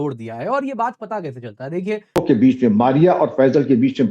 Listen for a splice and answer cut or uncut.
cut